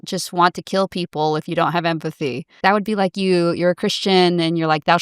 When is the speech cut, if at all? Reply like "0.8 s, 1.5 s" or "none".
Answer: 2.6 s